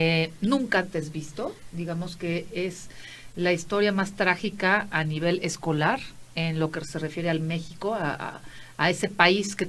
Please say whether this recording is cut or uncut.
cut